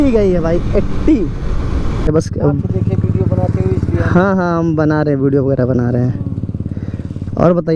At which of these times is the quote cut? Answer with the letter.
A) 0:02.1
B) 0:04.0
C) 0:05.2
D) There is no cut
A